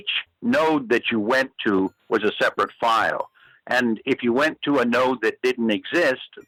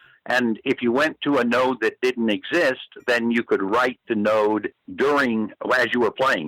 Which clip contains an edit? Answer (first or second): second